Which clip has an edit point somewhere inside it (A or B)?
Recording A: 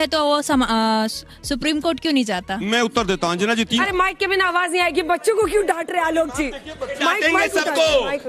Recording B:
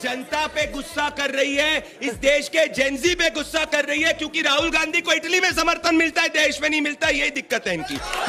A